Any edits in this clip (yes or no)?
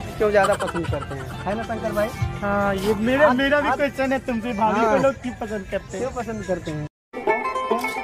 no